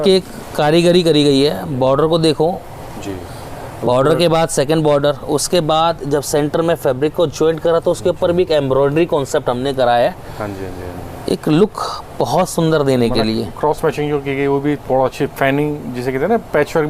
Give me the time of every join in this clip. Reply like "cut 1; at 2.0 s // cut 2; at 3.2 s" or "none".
none